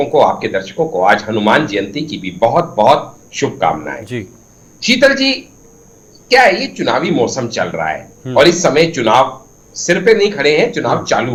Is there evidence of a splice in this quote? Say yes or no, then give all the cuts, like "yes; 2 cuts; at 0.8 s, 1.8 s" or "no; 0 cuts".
no; 0 cuts